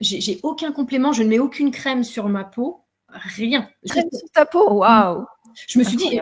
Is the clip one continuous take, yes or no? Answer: no